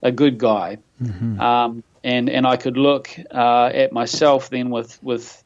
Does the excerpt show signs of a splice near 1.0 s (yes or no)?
no